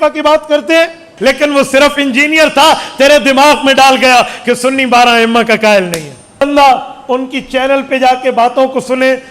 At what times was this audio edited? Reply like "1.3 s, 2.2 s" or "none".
1.1 s, 6.4 s

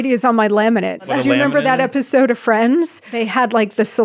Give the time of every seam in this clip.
1.1 s, 3.2 s

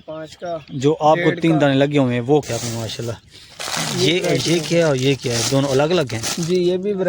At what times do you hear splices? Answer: 2.5 s

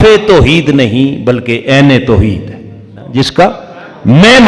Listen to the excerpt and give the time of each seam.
3.1 s

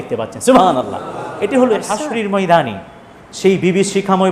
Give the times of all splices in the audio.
2.1 s

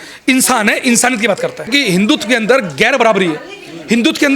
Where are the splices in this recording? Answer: 1.7 s

